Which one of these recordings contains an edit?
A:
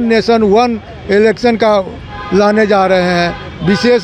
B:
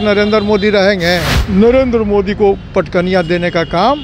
B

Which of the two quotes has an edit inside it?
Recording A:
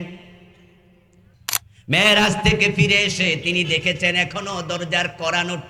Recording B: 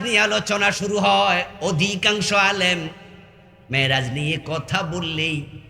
A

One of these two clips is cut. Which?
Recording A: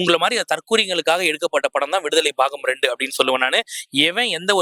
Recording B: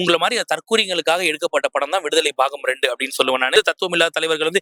B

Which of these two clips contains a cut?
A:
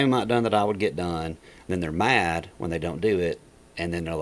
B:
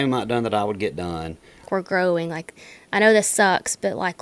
B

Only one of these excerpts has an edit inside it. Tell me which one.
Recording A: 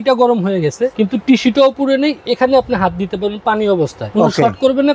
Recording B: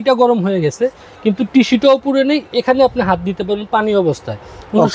A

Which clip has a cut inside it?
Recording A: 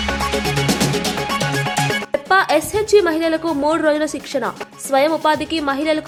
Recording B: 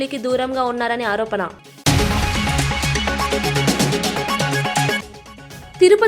B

